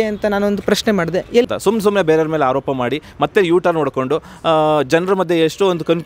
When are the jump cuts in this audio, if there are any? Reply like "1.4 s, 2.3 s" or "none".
1.5 s